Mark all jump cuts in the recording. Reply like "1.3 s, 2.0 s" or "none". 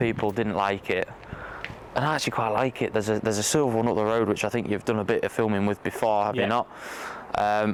none